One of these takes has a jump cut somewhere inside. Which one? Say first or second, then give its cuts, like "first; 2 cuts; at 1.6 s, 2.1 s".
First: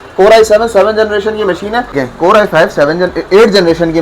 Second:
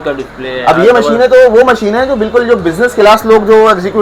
first; 1 cut; at 2.0 s